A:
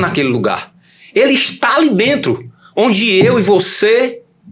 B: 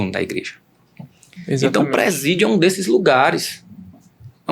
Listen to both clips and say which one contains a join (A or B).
B